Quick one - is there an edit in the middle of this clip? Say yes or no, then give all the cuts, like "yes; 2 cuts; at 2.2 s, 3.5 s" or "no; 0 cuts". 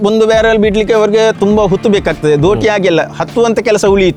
no; 0 cuts